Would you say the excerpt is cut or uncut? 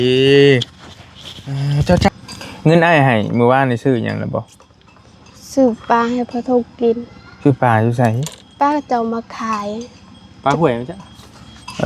cut